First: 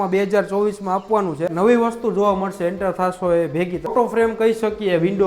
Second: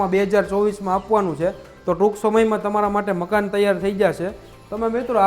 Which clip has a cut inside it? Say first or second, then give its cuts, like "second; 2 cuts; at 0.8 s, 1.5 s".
first; 2 cuts; at 1.5 s, 3.9 s